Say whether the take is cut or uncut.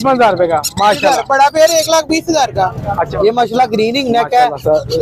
cut